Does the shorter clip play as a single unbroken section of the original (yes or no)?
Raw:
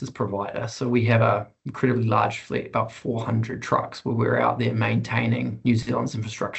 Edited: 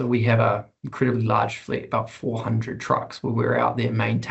yes